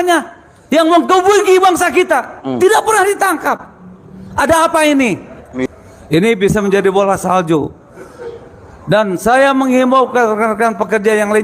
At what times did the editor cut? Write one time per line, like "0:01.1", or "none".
0:05.5